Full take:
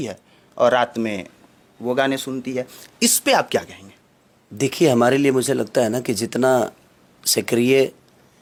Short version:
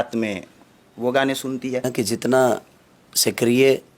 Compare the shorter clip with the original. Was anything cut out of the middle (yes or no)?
yes